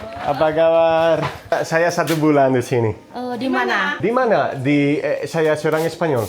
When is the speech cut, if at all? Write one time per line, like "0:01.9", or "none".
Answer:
0:01.5

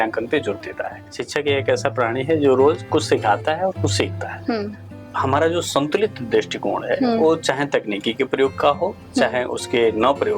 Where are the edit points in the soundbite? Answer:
0:01.1
0:04.8

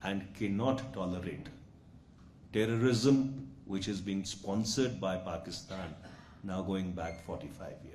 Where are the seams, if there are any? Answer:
none

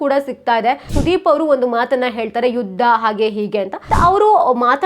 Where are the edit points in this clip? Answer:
0:00.9
0:03.8

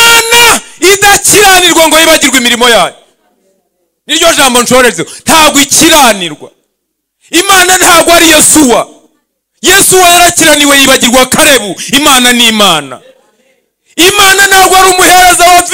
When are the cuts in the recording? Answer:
none

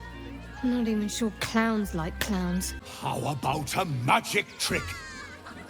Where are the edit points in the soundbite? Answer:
0:02.8

